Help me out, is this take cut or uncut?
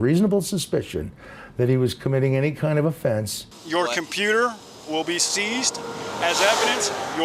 cut